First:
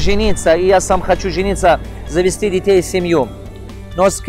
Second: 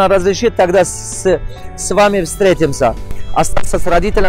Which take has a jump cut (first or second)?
second